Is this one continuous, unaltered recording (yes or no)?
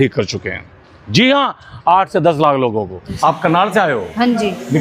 no